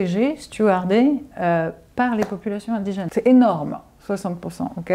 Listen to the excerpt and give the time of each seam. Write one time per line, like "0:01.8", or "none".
0:03.1